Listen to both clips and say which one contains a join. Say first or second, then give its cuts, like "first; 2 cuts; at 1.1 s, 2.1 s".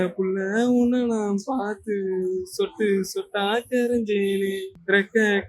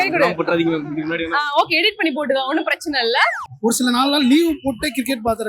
second; 1 cut; at 3.5 s